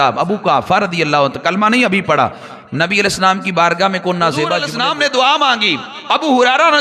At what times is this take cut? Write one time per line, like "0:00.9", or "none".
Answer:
0:04.6

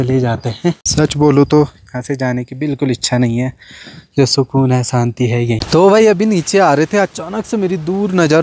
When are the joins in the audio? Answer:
0:00.8
0:05.6

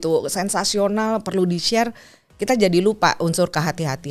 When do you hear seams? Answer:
none

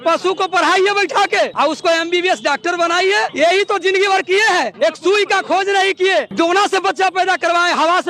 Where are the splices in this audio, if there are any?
0:01.5
0:03.3
0:04.7
0:06.3

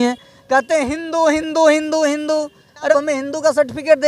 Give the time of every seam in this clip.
0:02.9

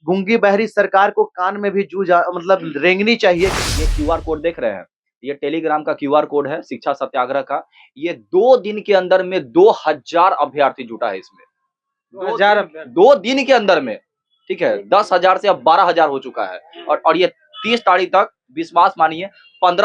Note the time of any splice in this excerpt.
0:03.6

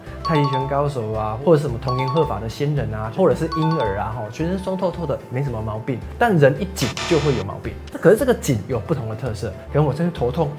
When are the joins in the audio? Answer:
0:09.5

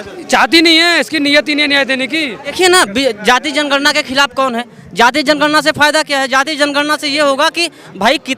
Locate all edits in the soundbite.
0:02.5

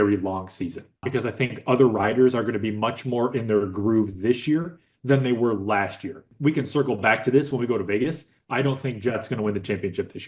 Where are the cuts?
0:01.0
0:06.3

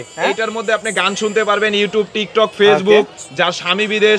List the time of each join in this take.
none

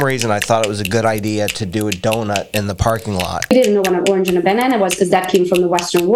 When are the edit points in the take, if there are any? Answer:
0:03.5

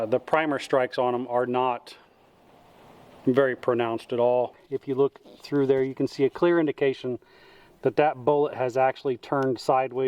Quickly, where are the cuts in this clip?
0:04.7

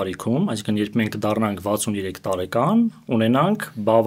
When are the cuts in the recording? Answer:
none

